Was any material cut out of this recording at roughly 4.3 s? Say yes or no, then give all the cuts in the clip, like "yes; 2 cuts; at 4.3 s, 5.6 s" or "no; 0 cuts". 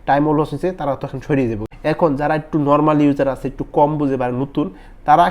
no; 1 cut; at 1.7 s